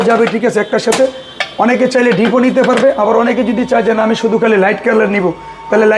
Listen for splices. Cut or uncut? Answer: uncut